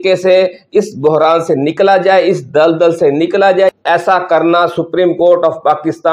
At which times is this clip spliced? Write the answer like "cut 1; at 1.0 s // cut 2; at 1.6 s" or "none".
cut 1; at 3.7 s